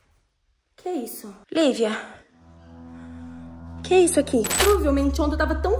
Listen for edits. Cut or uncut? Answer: cut